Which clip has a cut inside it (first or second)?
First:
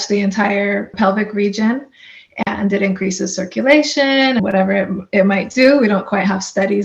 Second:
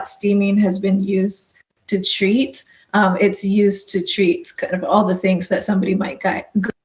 first